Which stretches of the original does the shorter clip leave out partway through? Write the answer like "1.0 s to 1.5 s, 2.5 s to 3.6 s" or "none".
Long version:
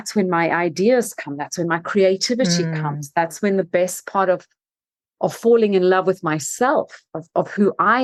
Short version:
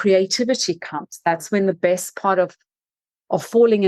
none